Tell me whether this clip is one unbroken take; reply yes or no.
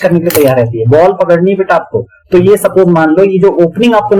yes